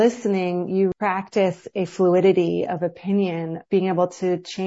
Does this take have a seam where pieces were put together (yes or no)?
yes